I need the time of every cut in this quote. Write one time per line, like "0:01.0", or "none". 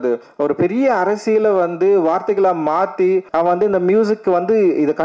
0:03.3

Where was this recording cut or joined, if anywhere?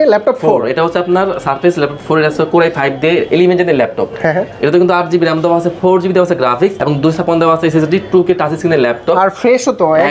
none

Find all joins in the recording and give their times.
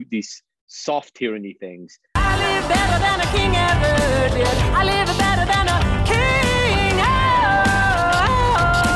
0:01.9

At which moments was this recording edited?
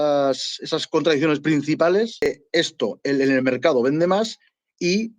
0:02.3

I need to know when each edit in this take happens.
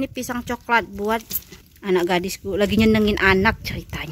none

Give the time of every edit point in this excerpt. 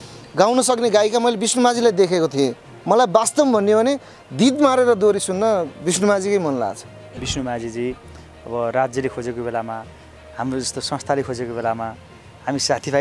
0:02.7
0:07.2

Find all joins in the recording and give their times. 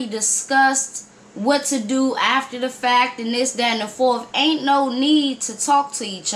none

